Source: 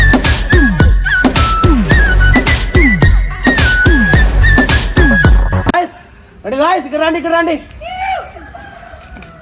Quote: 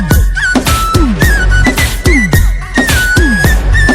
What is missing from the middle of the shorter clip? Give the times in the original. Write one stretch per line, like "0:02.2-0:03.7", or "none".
none